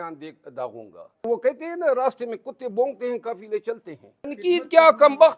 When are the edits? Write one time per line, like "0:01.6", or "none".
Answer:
0:01.2
0:04.3